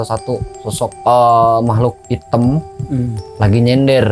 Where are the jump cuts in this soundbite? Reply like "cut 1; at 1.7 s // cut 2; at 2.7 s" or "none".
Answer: cut 1; at 1.0 s // cut 2; at 2.0 s // cut 3; at 3.2 s

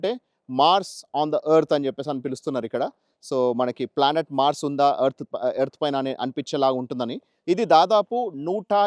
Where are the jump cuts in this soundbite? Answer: cut 1; at 7.3 s

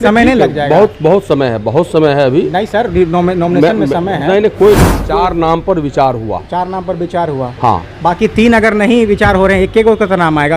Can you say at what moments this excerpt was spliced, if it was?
cut 1; at 5.0 s

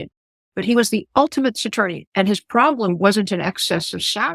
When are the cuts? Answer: cut 1; at 2.0 s

